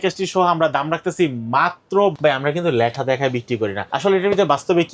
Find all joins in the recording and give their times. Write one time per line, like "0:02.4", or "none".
0:02.1
0:03.8